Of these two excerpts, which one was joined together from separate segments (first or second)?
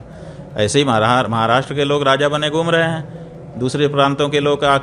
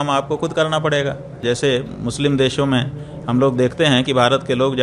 second